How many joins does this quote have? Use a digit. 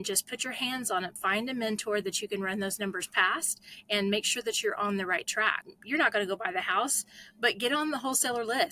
2